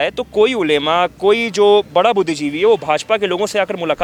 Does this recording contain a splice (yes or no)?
no